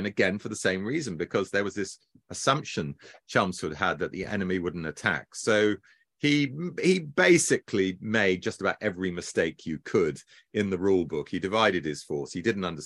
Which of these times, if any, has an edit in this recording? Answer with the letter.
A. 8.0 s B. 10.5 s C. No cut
C